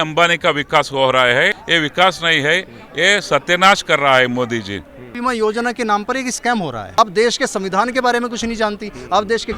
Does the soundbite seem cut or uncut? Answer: cut